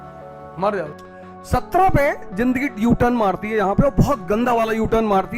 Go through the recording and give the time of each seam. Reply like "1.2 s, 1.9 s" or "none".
1.4 s